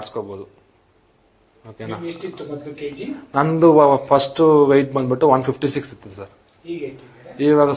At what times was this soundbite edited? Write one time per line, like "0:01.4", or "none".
0:06.0